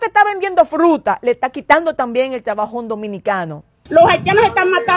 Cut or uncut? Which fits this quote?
cut